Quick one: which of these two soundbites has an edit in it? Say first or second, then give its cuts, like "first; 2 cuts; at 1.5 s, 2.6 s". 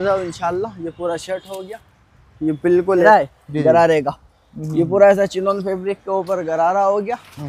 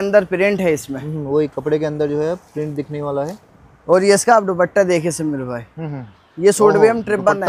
first; 1 cut; at 3.0 s